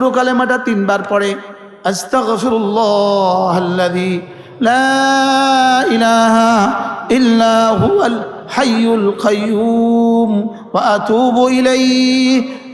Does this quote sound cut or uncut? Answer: uncut